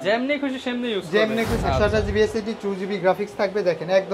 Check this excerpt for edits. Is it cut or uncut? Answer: cut